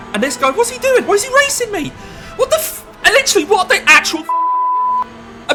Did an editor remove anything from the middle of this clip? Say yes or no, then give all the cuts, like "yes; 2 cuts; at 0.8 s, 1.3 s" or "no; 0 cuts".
no; 0 cuts